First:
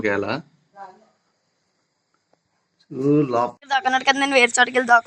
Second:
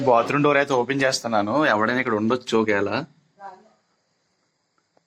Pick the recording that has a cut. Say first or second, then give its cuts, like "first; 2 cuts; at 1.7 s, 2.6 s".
first; 1 cut; at 3.5 s